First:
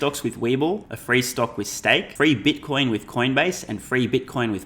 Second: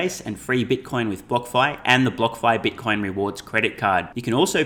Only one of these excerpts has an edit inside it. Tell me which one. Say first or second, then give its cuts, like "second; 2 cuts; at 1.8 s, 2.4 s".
first; 2 cuts; at 0.9 s, 2.1 s